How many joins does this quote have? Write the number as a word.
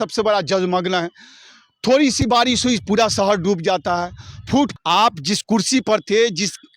one